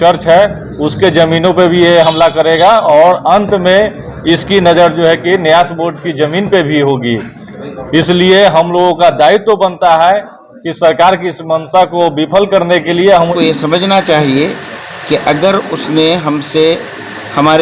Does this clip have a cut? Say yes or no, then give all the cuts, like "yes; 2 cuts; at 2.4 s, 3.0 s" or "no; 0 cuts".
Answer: yes; 1 cut; at 13.2 s